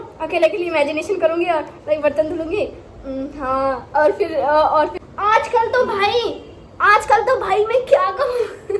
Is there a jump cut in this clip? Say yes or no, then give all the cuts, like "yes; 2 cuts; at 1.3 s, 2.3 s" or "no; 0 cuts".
yes; 1 cut; at 4.9 s